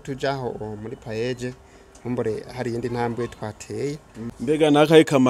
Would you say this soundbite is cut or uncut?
cut